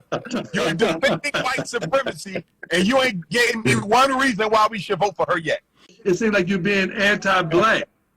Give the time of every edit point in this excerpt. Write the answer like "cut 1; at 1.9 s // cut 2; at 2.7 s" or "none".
cut 1; at 5.9 s